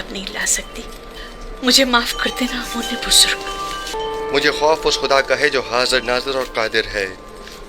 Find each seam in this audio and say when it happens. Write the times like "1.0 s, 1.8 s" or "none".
3.9 s